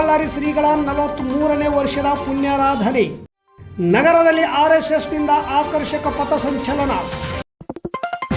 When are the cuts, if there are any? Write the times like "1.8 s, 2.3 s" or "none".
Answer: 7.4 s